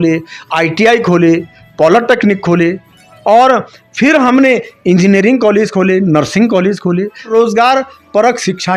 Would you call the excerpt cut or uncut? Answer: cut